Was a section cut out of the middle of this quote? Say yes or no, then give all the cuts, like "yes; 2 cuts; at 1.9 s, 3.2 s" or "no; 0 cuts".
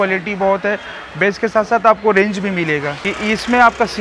yes; 1 cut; at 3.0 s